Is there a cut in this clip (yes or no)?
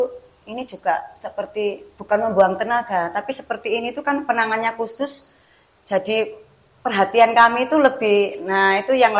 no